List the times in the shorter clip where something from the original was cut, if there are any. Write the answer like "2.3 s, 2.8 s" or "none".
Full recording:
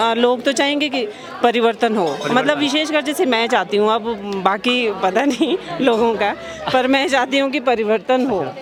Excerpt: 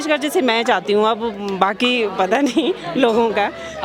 none